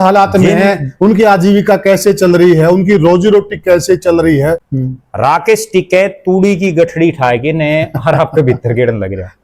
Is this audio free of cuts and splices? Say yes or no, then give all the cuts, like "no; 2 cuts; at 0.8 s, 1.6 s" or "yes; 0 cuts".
no; 1 cut; at 4.7 s